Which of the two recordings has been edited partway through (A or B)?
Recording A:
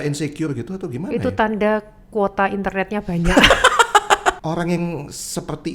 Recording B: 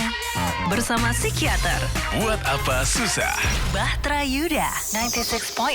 A